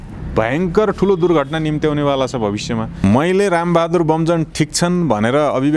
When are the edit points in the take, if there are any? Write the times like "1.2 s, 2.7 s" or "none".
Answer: 2.9 s